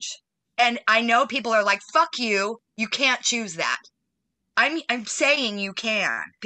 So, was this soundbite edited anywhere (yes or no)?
no